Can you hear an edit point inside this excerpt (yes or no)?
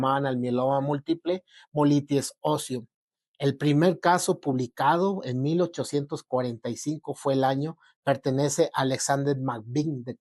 no